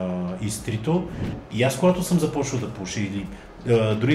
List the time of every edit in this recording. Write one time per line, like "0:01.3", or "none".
0:01.4